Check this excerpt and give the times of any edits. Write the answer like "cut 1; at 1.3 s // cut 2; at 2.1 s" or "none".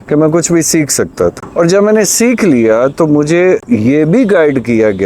cut 1; at 1.4 s // cut 2; at 3.6 s